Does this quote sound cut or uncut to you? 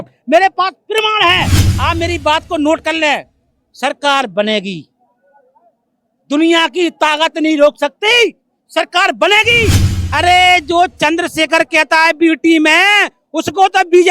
cut